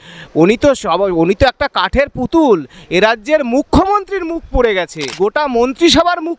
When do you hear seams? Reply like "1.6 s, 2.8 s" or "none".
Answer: 5.1 s